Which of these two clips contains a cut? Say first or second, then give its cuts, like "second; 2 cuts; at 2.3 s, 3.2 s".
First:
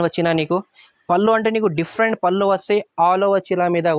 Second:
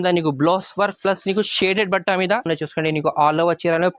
second; 1 cut; at 2.5 s